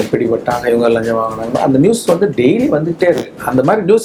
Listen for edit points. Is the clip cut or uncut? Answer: uncut